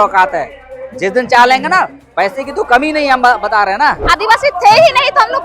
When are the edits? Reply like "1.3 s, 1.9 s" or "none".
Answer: 4.0 s